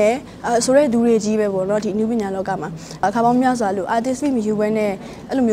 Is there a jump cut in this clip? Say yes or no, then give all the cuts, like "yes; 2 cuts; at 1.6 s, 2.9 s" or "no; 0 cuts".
yes; 1 cut; at 3.0 s